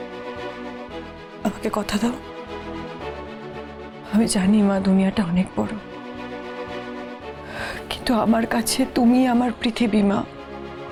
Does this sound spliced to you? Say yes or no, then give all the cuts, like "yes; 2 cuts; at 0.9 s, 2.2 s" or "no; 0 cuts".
no; 0 cuts